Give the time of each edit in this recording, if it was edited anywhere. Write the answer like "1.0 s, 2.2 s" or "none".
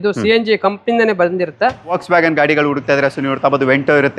2.0 s